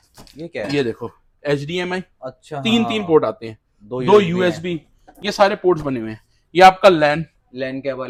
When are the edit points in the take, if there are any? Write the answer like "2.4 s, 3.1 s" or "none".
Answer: none